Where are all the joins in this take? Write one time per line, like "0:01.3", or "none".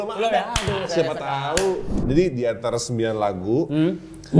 0:02.0